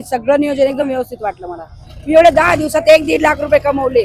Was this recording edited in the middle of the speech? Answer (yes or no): yes